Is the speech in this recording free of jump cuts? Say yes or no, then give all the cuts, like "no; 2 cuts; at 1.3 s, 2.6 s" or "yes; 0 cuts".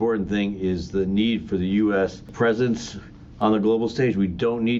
no; 1 cut; at 2.3 s